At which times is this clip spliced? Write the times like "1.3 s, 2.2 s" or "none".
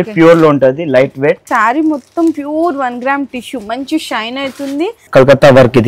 1.5 s, 5.0 s